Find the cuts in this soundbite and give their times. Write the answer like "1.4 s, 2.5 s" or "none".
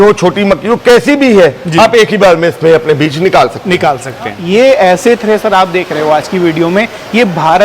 4.4 s